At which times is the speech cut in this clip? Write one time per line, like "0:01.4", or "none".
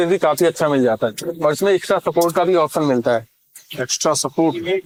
none